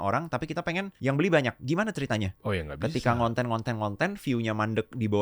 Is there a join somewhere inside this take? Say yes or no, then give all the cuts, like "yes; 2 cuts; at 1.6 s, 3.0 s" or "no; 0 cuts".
yes; 2 cuts; at 0.9 s, 2.3 s